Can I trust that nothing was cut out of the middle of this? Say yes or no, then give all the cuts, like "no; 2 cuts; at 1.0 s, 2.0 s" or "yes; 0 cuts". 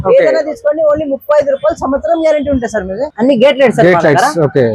no; 1 cut; at 3.1 s